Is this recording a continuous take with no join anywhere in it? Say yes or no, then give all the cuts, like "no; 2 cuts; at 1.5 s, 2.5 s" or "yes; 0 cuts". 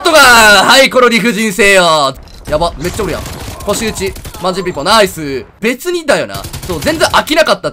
no; 2 cuts; at 2.2 s, 5.5 s